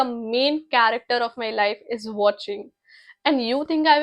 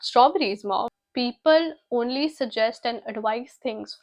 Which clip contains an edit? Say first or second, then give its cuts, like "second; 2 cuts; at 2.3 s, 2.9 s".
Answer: second; 1 cut; at 1.0 s